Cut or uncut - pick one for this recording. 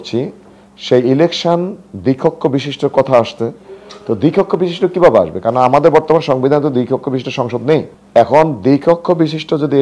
uncut